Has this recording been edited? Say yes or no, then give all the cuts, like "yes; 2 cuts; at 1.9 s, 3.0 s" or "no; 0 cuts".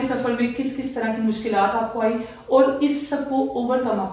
no; 0 cuts